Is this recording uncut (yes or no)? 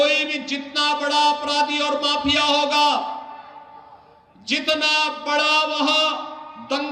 yes